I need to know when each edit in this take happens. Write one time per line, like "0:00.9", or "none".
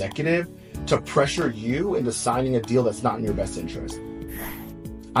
none